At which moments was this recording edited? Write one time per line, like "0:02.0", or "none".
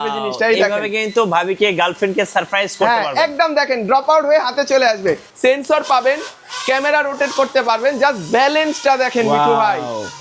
0:05.3